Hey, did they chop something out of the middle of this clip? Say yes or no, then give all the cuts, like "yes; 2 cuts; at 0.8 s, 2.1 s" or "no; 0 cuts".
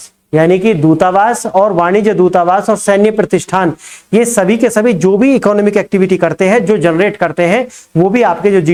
no; 0 cuts